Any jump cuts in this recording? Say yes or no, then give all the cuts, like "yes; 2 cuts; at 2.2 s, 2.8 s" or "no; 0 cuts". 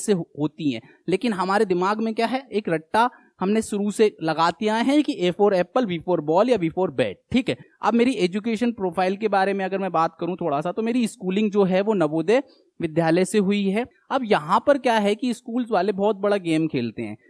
yes; 2 cuts; at 7.7 s, 13.9 s